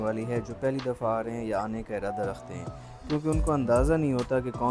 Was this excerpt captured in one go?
yes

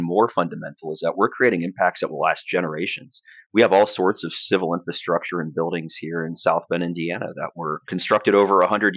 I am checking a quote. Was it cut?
yes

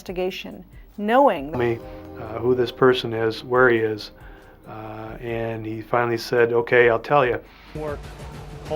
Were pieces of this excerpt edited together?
yes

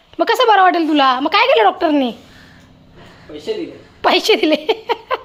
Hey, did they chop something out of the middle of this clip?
no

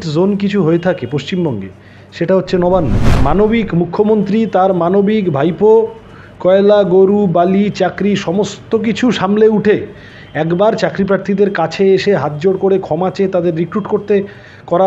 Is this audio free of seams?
no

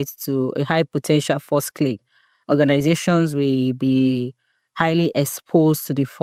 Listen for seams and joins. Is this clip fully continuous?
yes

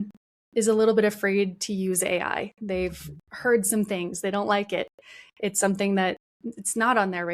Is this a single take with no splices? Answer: no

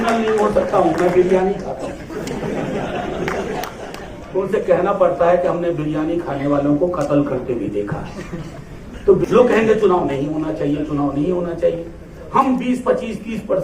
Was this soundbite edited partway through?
yes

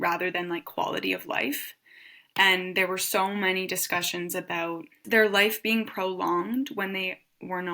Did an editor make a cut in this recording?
yes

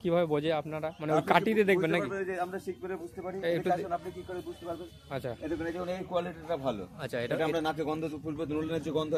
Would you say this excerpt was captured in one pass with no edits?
yes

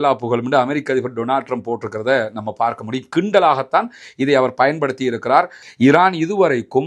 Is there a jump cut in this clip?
yes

